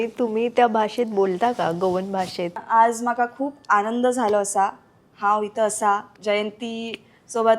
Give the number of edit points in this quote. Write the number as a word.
two